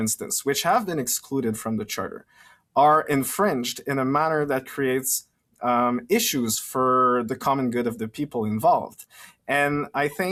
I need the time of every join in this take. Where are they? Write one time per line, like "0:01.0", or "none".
none